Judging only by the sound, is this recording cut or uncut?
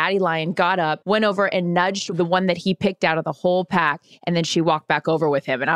cut